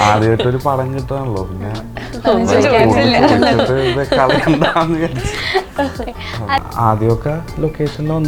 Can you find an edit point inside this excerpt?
yes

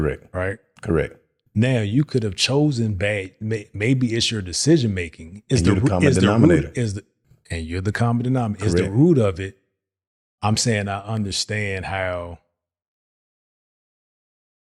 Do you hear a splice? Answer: no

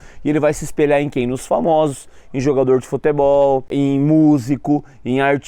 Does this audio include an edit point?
yes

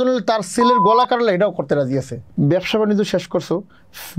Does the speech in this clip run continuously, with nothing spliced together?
no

